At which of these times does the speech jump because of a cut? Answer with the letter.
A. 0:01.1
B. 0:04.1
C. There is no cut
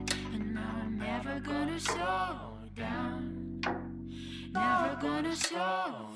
C